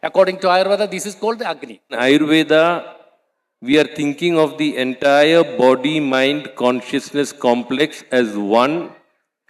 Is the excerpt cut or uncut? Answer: cut